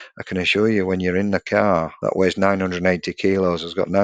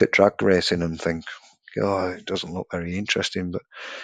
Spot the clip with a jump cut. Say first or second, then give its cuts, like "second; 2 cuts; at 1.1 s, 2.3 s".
first; 1 cut; at 1.9 s